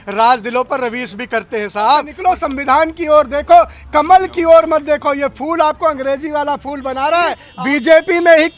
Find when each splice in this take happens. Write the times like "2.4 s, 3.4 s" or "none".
2.1 s, 7.4 s